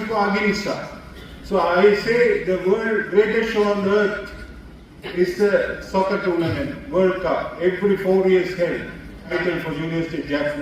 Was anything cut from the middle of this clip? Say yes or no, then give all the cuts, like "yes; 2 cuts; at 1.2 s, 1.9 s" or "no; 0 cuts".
yes; 1 cut; at 9.3 s